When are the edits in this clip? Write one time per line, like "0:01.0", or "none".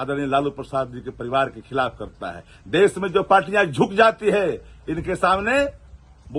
none